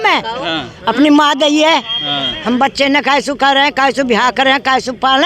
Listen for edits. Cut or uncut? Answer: uncut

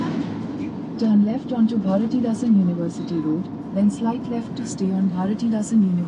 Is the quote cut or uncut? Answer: uncut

